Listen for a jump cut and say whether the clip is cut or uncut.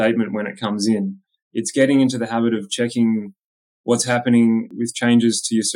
cut